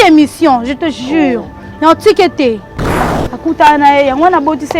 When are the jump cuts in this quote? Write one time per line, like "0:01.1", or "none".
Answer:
0:03.2